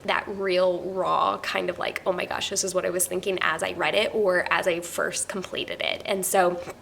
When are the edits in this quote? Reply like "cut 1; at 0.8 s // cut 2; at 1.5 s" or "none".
none